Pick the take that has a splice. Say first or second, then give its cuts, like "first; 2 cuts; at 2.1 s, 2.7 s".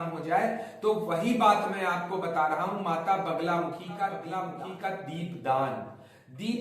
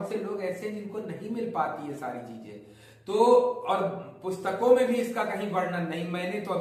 first; 1 cut; at 4.5 s